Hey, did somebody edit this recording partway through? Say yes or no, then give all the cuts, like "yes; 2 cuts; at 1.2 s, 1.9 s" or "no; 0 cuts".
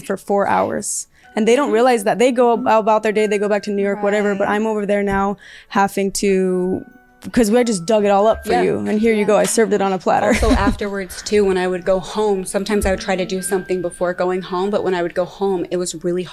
no; 0 cuts